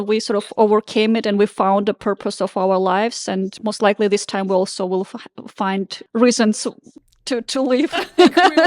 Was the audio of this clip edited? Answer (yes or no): yes